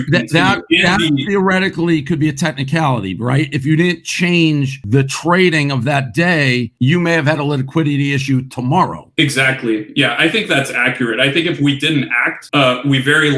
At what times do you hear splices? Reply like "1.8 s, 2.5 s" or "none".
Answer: none